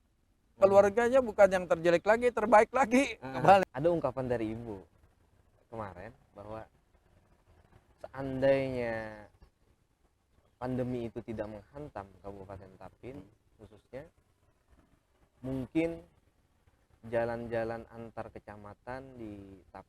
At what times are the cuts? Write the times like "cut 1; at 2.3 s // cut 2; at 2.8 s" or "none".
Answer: cut 1; at 3.6 s